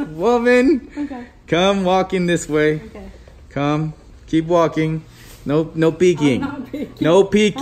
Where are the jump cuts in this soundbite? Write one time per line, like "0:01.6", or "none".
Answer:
none